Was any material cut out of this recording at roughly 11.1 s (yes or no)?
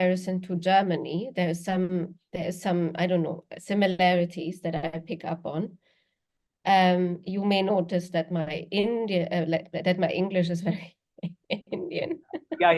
no